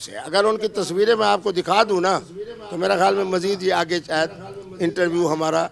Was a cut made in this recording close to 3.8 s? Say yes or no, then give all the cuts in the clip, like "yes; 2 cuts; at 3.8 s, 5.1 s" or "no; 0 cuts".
no; 0 cuts